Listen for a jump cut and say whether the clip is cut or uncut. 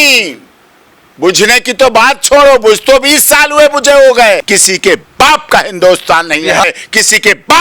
cut